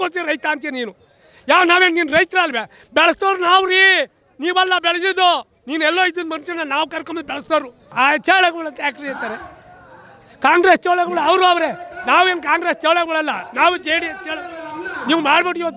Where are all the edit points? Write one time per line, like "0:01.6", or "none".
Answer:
0:07.8